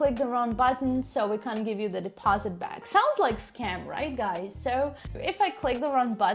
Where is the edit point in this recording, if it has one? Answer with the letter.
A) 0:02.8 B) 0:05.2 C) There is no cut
B